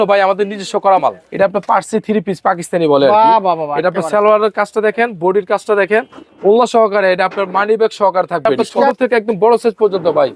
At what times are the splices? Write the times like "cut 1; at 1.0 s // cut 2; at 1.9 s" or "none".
cut 1; at 1.2 s // cut 2; at 8.9 s